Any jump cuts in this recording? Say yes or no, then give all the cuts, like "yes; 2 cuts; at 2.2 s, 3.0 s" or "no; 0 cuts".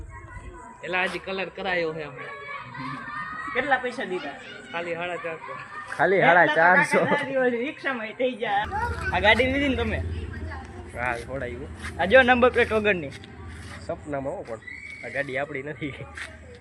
yes; 1 cut; at 8.7 s